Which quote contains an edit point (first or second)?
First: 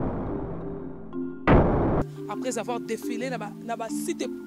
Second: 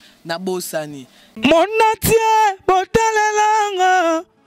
second